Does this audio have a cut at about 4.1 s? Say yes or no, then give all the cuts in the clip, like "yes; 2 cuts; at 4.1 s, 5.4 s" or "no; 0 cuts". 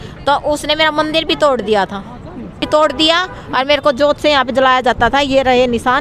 no; 1 cut; at 2.7 s